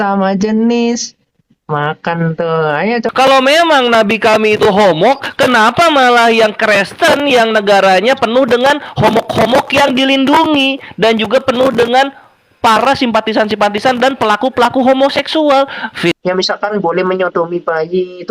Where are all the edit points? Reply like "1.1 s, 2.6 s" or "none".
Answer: 3.1 s, 16.1 s